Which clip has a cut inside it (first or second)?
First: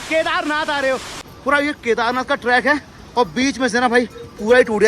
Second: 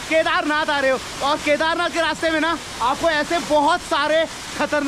first